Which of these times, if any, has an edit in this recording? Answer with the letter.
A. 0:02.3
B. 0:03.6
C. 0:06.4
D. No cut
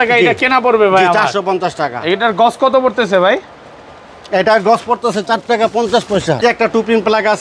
C